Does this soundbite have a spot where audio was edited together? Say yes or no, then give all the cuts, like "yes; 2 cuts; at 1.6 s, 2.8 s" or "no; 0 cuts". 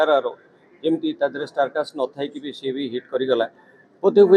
no; 0 cuts